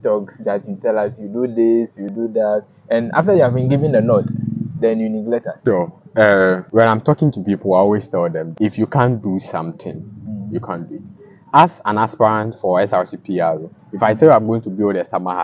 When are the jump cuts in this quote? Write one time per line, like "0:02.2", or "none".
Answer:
0:05.5
0:06.6
0:08.5

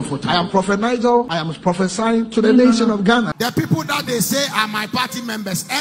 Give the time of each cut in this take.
0:01.4
0:03.4

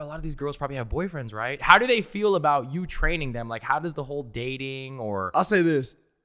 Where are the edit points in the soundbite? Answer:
0:05.3

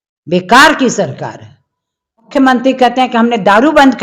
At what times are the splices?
0:02.3

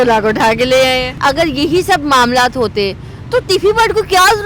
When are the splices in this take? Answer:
0:01.2

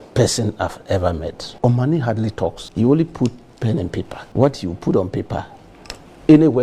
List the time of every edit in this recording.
0:01.4
0:02.6
0:04.2

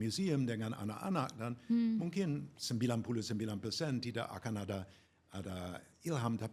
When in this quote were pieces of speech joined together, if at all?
none

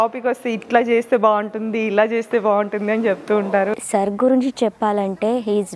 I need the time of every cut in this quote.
0:03.7

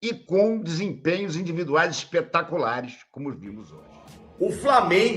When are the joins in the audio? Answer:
0:03.4

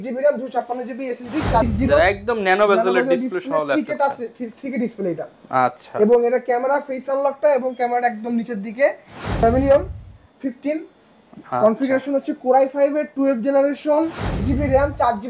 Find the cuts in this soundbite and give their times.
0:01.6
0:09.4
0:14.4

